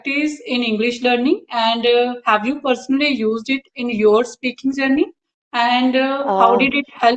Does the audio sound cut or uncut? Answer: uncut